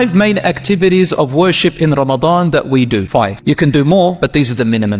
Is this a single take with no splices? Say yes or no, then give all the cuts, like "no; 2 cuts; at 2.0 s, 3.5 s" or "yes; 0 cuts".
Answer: no; 1 cut; at 3.3 s